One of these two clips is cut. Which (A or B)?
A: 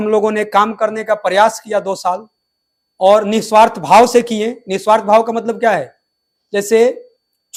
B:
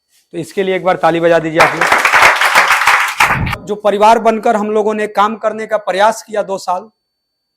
B